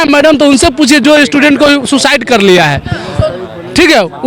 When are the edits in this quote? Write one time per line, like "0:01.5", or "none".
none